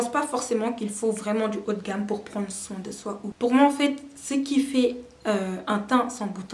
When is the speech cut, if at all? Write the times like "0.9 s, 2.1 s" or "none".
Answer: 3.3 s